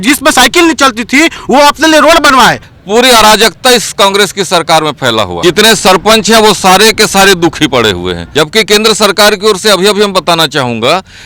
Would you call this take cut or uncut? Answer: cut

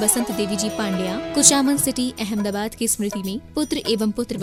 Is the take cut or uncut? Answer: uncut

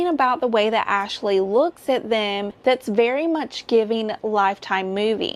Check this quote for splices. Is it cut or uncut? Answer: uncut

